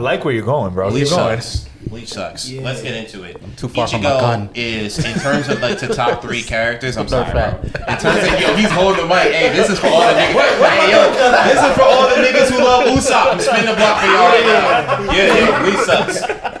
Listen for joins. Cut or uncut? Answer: uncut